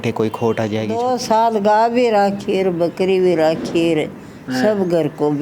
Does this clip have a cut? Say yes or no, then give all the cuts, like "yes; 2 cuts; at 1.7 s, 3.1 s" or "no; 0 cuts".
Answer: yes; 1 cut; at 1.0 s